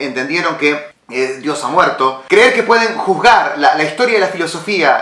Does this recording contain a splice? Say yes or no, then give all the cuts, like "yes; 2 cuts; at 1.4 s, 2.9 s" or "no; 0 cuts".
yes; 2 cuts; at 1.0 s, 2.2 s